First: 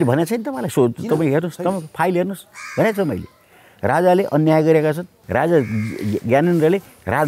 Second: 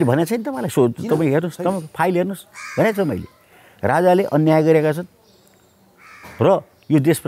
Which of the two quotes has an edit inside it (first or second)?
first